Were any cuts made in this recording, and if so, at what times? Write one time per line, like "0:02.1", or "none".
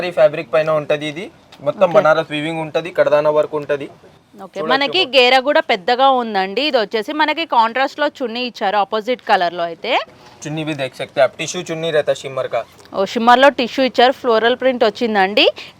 none